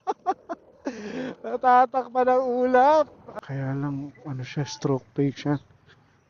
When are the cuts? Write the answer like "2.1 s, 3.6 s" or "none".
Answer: 3.2 s